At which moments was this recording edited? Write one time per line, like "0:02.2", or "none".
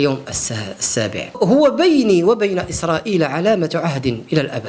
0:01.3